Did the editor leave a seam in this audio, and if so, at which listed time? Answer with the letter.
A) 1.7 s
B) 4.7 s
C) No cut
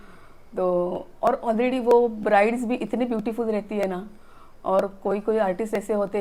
C